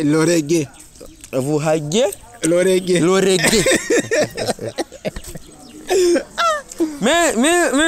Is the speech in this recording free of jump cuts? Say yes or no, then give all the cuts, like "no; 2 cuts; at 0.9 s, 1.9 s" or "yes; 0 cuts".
yes; 0 cuts